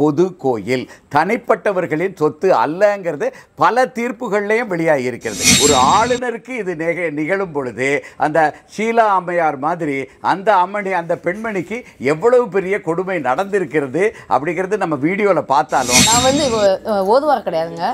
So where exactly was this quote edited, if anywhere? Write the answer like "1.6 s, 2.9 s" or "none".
5.5 s, 16.1 s